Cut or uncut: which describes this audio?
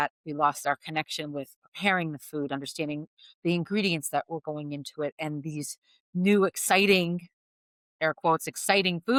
uncut